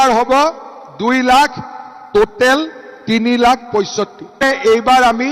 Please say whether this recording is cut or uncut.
cut